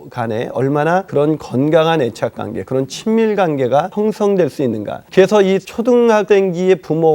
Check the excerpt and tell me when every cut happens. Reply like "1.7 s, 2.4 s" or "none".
1.1 s, 3.9 s, 4.9 s, 6.1 s